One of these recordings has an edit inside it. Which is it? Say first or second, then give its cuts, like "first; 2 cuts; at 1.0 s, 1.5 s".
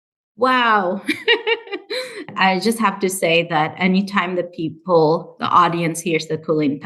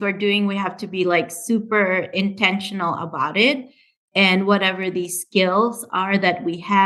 first; 1 cut; at 2.2 s